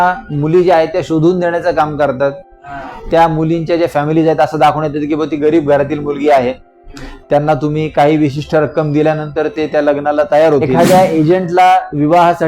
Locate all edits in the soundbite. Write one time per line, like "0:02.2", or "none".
0:10.7